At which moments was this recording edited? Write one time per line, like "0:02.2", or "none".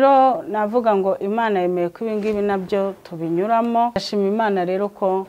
0:04.0